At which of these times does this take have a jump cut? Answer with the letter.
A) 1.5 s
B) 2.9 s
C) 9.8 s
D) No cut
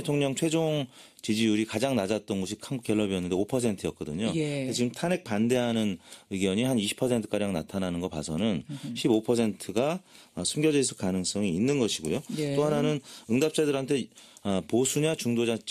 D